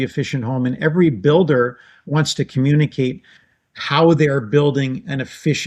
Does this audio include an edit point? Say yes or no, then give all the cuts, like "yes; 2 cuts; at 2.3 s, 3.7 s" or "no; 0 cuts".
no; 0 cuts